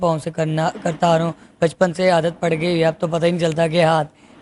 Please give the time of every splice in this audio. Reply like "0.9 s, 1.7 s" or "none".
none